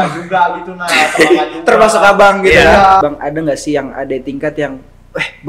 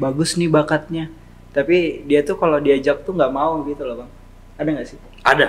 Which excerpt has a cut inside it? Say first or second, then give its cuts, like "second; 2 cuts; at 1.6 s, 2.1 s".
first; 1 cut; at 3.0 s